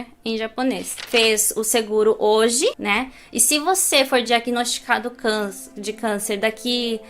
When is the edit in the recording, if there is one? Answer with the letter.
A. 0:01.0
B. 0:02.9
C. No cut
A